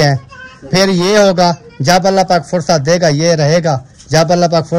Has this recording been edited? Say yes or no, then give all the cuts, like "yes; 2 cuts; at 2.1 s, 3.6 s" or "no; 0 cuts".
no; 0 cuts